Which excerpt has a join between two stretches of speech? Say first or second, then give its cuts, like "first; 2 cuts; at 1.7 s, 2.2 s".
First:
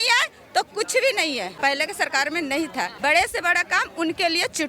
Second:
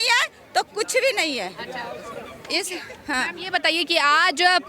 first; 2 cuts; at 1.5 s, 2.9 s